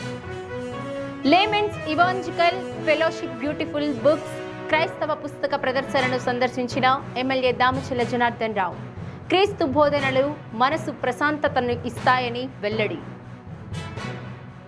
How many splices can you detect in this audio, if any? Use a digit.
0